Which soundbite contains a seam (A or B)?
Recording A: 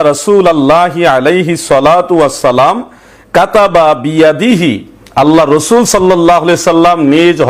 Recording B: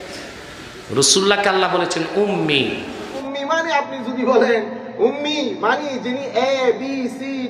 B